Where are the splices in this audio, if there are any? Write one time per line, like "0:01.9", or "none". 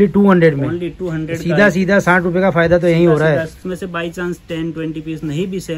0:03.6